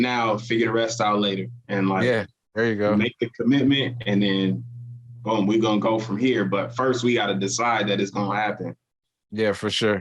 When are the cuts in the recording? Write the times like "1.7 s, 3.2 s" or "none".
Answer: none